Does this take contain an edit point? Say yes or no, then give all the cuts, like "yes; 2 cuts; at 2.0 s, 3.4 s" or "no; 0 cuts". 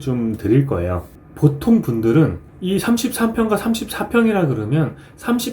yes; 1 cut; at 1.1 s